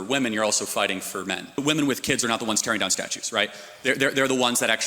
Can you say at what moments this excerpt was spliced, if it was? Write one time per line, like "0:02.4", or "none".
0:01.6